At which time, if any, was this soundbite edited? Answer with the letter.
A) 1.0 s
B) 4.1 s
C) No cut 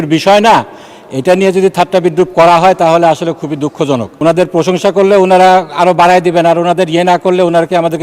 B